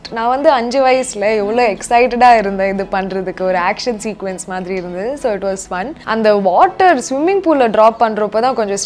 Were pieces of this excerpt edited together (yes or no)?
yes